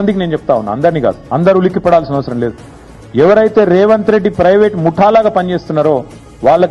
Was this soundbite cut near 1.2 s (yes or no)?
yes